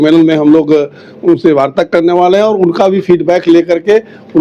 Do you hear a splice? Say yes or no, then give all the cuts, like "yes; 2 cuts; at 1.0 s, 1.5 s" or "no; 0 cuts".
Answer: no; 0 cuts